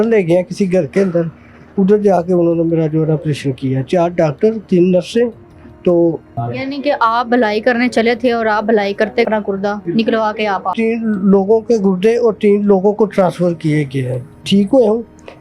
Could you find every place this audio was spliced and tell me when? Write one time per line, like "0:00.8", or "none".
0:06.4
0:09.3
0:10.7
0:14.3